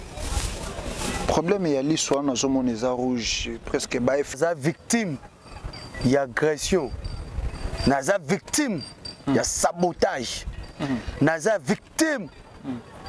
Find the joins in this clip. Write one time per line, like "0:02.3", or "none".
0:04.4